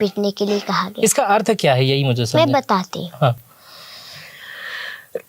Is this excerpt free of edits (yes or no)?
yes